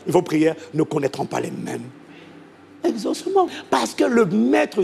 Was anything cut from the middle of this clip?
yes; 1 cut; at 3.5 s

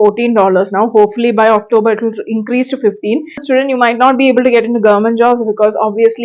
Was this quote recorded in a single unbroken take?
no; 1 cut; at 3.4 s

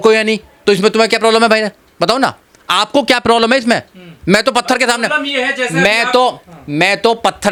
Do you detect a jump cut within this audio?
no; 0 cuts

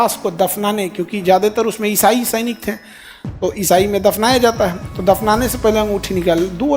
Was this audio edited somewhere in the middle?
yes; 1 cut; at 4.9 s

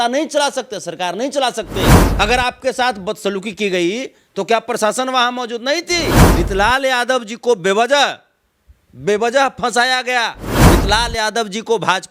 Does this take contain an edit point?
yes; 3 cuts; at 2.0 s, 6.2 s, 10.5 s

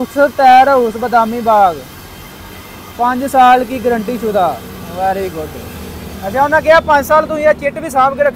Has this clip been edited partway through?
no; 0 cuts

